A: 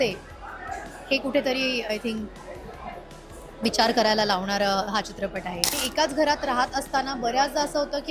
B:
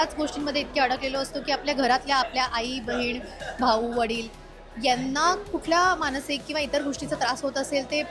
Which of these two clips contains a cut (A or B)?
A